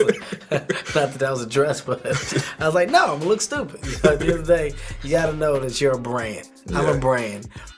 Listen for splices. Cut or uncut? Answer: uncut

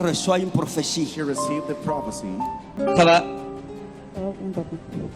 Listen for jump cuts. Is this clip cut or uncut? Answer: cut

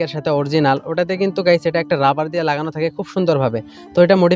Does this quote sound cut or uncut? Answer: uncut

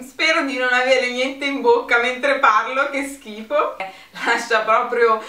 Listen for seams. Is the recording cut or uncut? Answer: cut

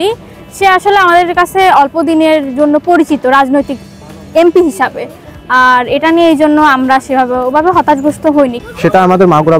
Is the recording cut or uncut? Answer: uncut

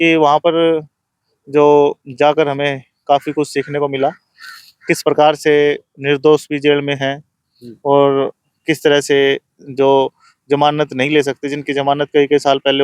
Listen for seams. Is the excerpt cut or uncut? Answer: uncut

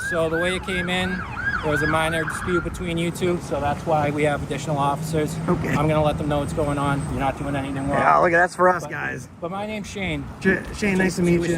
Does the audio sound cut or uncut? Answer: uncut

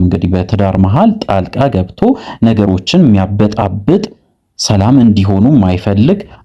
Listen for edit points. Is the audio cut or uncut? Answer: uncut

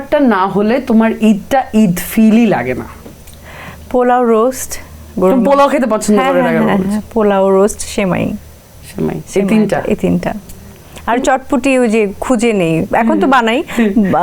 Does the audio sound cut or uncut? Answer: uncut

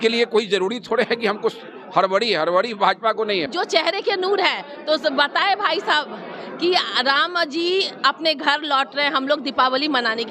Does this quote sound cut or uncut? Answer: cut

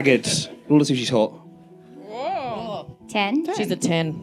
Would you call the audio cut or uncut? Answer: uncut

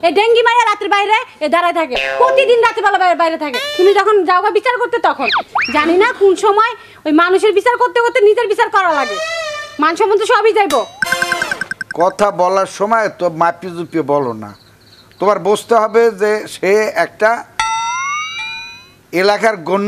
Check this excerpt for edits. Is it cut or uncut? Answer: uncut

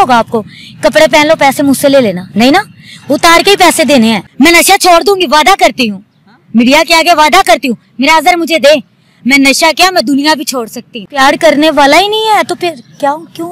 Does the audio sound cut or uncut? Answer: cut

